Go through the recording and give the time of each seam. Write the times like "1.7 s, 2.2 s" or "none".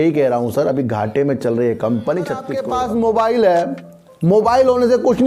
2.6 s